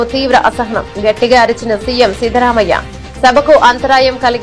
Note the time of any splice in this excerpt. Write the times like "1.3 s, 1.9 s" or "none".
none